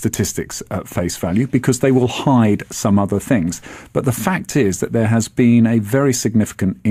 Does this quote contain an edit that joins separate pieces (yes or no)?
no